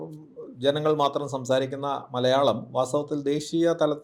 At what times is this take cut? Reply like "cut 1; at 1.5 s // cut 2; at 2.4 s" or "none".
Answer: none